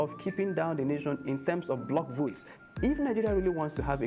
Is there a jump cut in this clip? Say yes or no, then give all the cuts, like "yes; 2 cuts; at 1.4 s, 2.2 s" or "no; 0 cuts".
yes; 1 cut; at 2.5 s